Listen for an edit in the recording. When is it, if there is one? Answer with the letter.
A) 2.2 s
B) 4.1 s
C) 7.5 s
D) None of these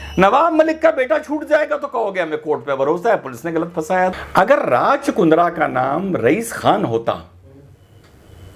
B